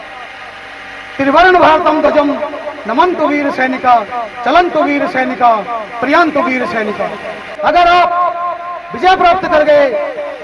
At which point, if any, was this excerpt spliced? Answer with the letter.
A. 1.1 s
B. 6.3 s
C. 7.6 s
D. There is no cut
C